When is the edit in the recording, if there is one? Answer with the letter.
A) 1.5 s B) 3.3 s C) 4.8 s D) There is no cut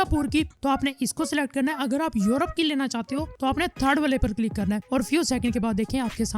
C